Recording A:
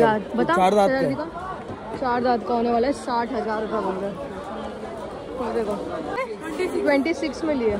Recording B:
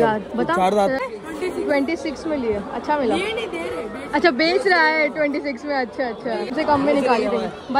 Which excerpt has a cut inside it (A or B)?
B